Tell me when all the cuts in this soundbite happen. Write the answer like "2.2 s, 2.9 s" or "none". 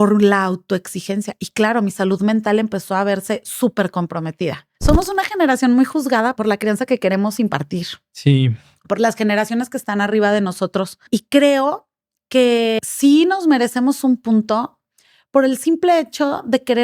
4.7 s, 6.3 s, 11.0 s, 12.8 s